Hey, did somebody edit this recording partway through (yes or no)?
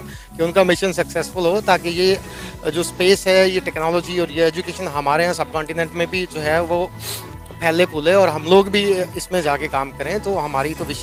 no